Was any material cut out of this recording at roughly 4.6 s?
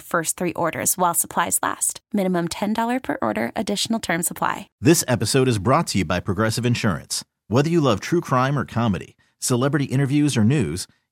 yes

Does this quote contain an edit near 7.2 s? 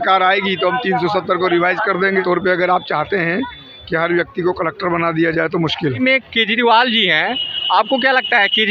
no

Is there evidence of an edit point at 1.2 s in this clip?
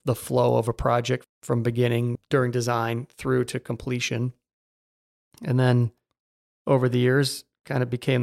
yes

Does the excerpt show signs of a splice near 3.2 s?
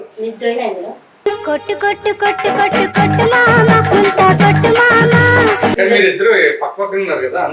no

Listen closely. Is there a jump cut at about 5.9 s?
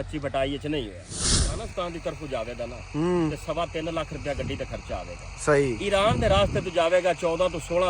no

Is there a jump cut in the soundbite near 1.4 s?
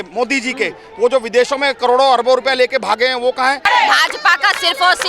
no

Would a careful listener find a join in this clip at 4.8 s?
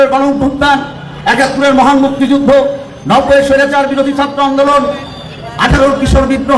no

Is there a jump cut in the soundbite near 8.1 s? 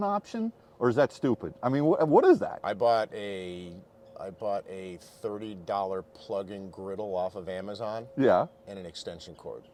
no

